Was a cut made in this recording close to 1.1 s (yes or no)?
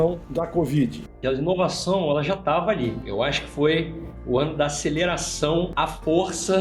yes